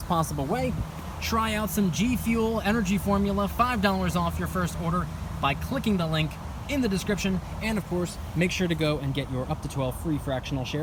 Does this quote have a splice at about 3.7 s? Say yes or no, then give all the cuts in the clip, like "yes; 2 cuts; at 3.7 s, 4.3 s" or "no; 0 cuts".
no; 0 cuts